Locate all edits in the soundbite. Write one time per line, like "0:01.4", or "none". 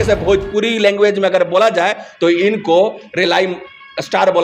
none